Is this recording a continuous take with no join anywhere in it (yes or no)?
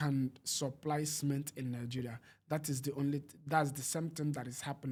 yes